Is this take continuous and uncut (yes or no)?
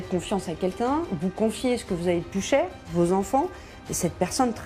yes